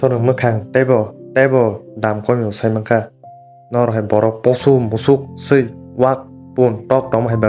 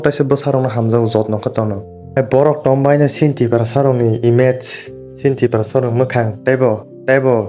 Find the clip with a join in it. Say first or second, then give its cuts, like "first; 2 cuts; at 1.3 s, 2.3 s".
second; 1 cut; at 2.1 s